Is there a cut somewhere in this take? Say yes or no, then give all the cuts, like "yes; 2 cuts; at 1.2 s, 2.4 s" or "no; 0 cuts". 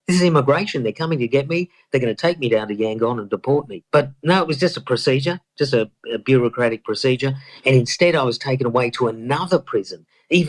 yes; 1 cut; at 3.8 s